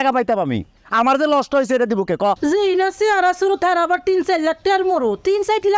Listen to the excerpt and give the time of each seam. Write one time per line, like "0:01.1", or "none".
0:02.4